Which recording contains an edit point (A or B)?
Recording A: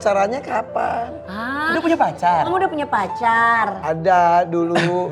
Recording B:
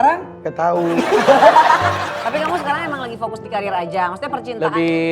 B